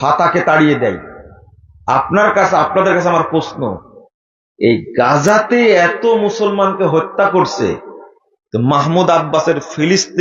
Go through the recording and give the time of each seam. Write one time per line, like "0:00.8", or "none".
none